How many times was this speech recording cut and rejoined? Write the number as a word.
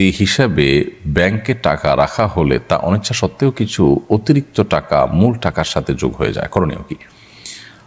zero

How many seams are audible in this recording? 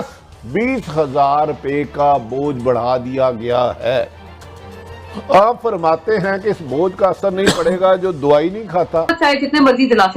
one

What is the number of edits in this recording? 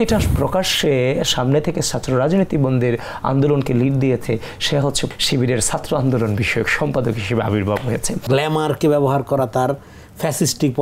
two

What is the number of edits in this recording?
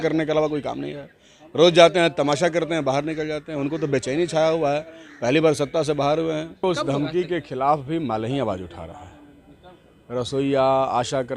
one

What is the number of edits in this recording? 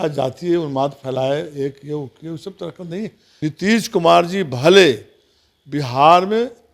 one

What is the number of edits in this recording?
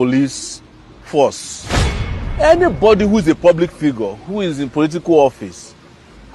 one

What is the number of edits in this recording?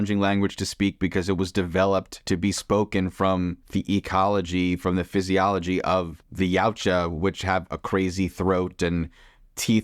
three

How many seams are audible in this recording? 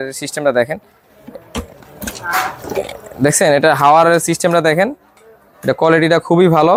zero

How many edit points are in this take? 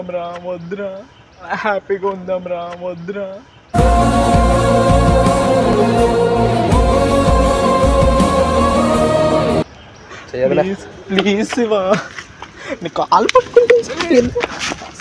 zero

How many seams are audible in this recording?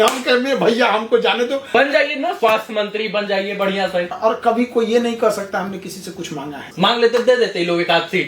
three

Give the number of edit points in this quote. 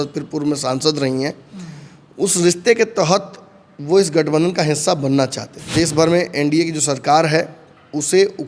one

